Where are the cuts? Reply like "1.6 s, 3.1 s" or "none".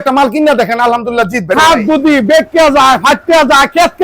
1.5 s